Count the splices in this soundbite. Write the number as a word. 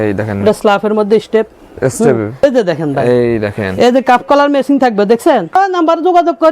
two